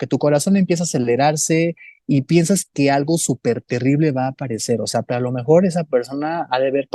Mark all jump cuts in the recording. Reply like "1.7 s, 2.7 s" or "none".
1.9 s, 5.0 s